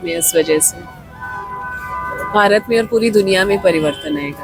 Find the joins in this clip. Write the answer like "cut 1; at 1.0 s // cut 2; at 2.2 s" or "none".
none